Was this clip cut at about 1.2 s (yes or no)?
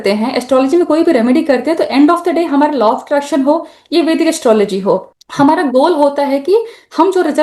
no